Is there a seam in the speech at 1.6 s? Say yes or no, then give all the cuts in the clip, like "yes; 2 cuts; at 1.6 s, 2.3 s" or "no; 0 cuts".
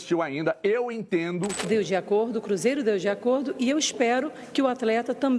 yes; 1 cut; at 1.6 s